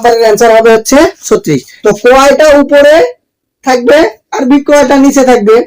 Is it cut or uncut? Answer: cut